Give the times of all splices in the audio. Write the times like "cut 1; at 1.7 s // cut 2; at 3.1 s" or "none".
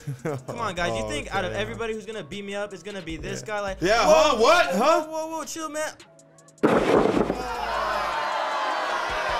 none